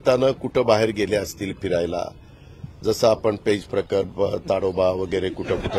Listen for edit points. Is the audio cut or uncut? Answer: uncut